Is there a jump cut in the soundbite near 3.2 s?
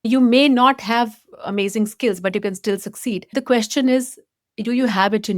yes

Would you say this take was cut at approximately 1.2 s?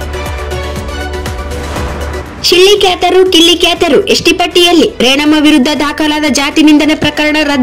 no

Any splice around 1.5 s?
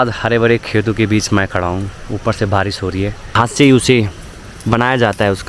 no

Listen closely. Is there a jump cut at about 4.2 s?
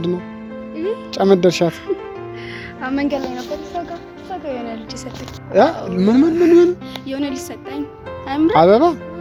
no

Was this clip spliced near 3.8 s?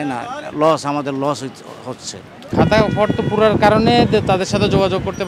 no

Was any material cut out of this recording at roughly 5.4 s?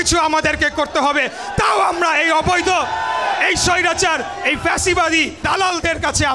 yes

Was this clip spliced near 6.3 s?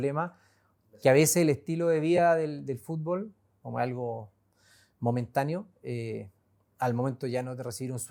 no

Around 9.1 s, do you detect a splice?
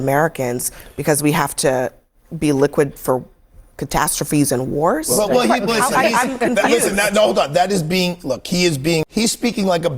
yes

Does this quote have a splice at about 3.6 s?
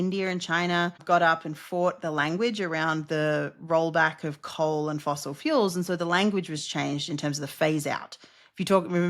no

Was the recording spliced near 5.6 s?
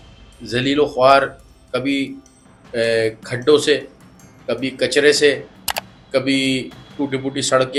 no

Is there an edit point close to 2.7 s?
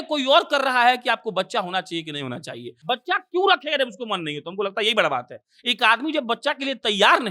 yes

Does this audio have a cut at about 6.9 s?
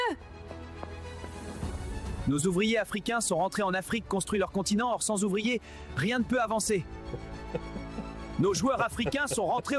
yes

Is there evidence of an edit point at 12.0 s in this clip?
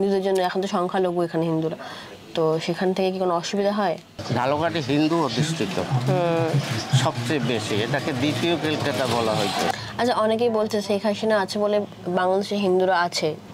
no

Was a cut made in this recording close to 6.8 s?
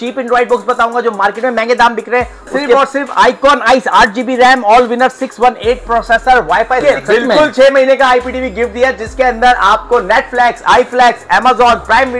yes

